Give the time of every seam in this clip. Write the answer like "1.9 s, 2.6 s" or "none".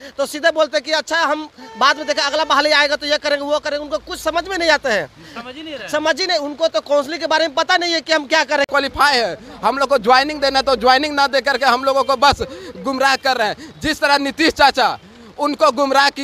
8.7 s